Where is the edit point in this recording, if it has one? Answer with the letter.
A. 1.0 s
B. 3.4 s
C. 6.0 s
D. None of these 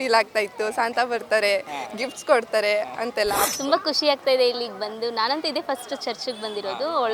B